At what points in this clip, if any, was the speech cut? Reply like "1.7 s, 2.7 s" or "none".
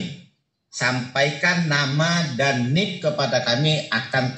none